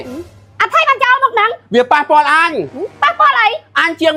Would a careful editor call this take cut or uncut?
uncut